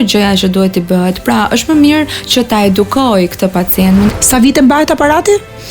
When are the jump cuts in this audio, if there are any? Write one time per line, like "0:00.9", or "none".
0:04.1